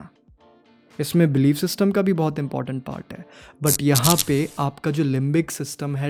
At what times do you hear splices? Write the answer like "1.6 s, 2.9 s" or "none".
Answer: none